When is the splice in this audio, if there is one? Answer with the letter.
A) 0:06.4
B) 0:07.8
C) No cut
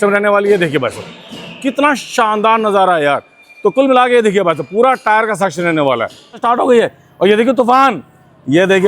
A